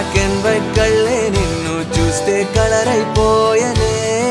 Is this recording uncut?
yes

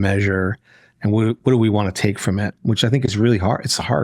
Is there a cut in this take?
yes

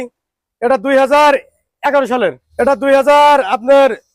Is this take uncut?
no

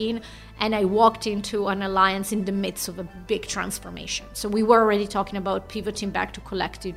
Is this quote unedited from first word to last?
yes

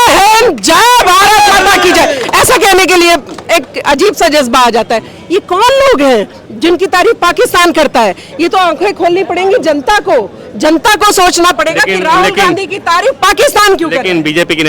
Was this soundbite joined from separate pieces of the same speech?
no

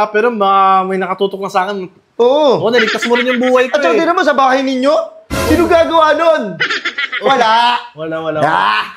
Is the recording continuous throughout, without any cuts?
yes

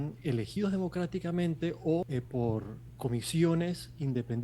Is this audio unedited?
no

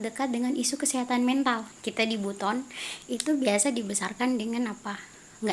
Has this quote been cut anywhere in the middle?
yes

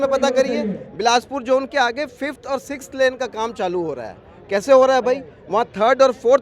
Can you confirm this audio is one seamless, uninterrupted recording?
yes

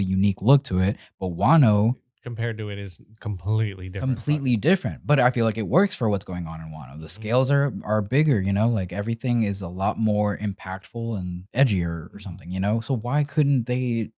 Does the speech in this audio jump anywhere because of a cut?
yes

